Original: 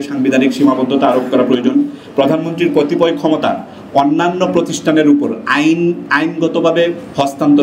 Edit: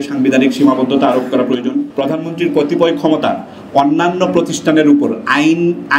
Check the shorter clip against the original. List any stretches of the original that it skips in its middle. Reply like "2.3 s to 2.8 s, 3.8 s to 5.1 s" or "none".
1.9 s to 2.1 s